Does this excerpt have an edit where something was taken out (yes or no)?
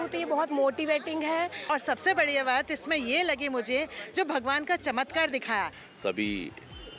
yes